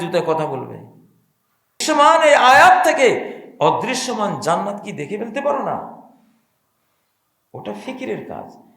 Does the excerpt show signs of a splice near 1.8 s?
yes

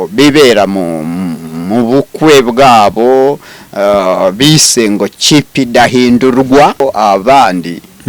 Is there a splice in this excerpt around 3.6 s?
no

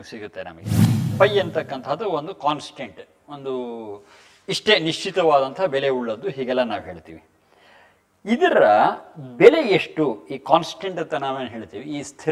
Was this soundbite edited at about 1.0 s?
yes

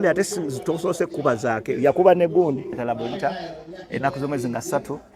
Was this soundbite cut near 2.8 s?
yes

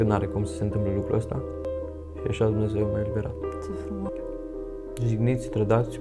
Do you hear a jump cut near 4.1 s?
yes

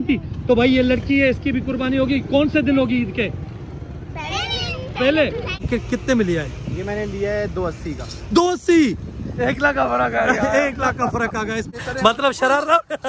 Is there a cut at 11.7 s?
yes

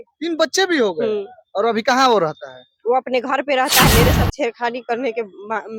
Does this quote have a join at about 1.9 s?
no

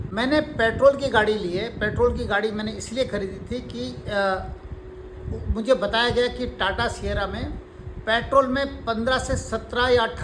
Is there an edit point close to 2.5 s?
no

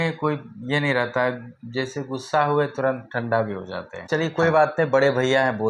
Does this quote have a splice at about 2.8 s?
no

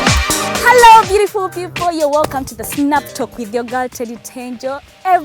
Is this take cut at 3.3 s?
no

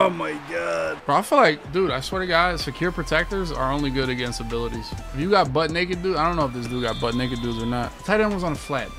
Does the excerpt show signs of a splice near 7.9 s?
no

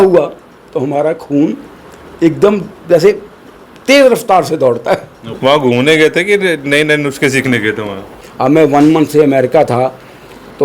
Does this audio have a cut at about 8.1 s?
yes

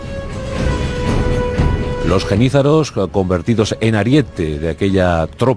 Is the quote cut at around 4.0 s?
yes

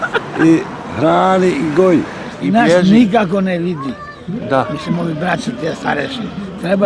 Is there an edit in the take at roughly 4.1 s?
no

